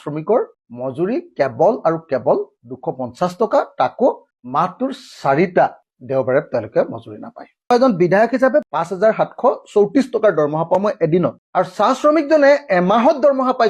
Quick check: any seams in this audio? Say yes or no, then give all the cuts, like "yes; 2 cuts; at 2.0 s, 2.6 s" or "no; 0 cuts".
no; 0 cuts